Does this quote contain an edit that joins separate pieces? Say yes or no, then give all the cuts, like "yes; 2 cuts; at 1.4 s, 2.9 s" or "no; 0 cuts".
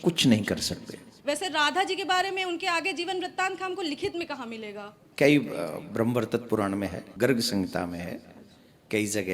yes; 3 cuts; at 1.1 s, 5.0 s, 7.0 s